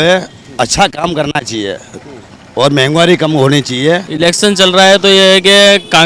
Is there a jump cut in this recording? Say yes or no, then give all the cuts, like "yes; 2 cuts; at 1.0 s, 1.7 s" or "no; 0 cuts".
yes; 1 cut; at 4.1 s